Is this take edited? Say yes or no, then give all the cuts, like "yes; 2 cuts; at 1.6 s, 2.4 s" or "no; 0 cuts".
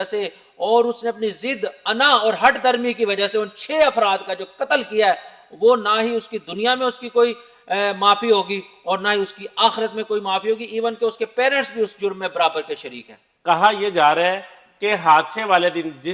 no; 0 cuts